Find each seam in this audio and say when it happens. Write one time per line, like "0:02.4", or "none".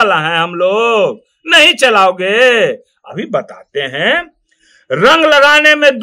none